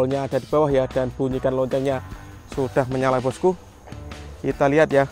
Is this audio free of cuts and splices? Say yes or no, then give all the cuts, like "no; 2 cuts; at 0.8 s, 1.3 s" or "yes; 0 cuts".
yes; 0 cuts